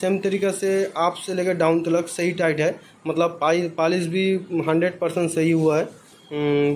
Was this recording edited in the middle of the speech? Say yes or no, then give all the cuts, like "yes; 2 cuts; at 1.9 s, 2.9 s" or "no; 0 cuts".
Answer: no; 0 cuts